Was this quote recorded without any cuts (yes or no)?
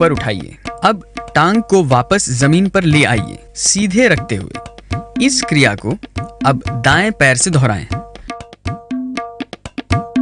no